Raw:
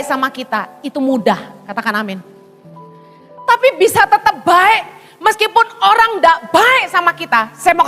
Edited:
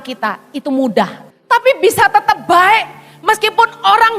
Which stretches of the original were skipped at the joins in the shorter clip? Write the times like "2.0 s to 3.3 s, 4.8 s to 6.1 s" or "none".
1.6 s to 3.2 s